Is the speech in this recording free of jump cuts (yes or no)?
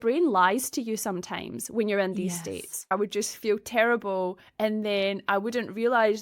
no